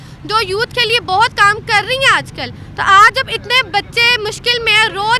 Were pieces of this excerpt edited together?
no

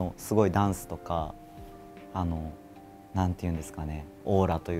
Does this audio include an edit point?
no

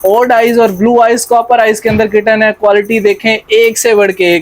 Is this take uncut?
yes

